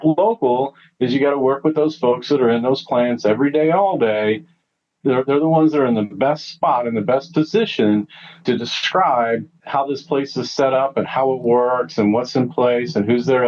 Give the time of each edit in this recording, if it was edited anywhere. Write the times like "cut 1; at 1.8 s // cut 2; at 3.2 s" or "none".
cut 1; at 4.8 s